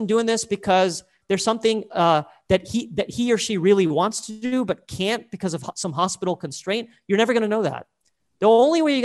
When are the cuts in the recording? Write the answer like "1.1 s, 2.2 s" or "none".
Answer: 1.1 s